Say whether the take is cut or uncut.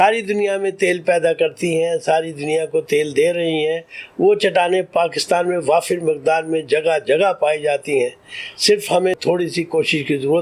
cut